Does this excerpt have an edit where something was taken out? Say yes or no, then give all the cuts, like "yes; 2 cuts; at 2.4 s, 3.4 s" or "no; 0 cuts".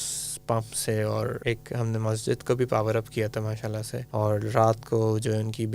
yes; 2 cuts; at 1.4 s, 3.9 s